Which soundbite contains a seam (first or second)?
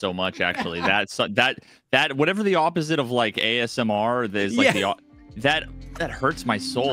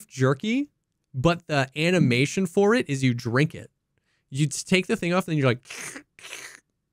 first